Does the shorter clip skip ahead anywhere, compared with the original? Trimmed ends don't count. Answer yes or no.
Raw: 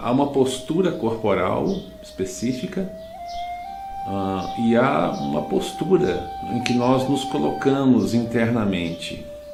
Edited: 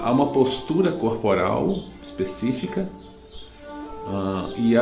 no